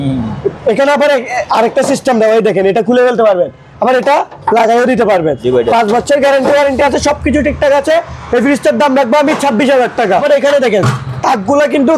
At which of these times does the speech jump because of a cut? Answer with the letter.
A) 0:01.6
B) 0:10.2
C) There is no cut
B